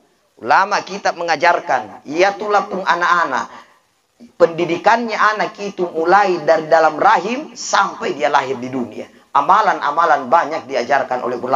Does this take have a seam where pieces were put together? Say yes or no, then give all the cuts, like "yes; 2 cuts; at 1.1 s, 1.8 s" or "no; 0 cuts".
no; 0 cuts